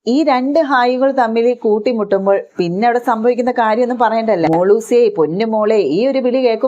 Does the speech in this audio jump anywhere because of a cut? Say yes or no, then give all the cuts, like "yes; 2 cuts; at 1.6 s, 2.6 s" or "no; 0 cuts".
yes; 1 cut; at 4.5 s